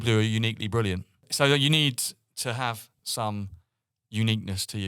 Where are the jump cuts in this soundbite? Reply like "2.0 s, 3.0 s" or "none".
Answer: 1.3 s, 3.0 s